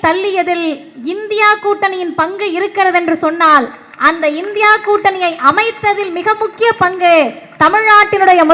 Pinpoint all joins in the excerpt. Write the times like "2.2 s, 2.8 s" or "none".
none